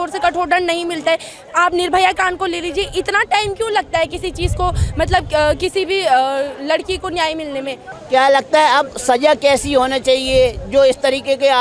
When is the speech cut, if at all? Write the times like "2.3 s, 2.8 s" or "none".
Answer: 7.9 s